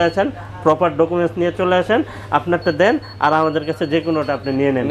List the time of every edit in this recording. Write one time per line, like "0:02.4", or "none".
none